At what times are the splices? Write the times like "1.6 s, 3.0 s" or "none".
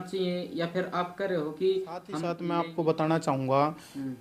2.3 s